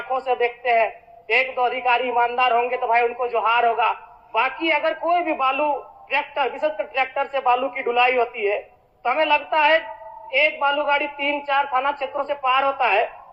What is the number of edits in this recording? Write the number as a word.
zero